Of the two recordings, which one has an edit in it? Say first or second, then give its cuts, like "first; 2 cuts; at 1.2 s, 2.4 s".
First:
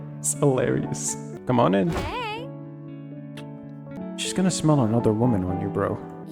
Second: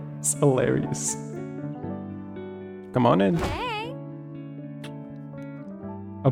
first; 2 cuts; at 1.2 s, 4.0 s